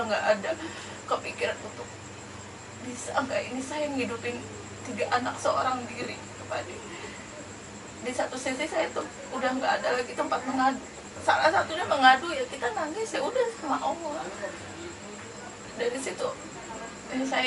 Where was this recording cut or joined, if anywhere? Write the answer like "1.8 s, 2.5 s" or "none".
none